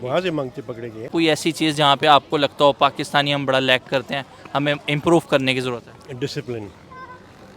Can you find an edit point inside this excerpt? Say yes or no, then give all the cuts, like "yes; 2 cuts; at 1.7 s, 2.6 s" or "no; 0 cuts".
yes; 1 cut; at 1.1 s